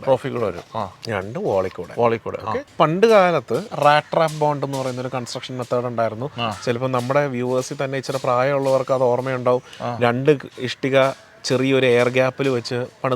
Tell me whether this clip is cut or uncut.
cut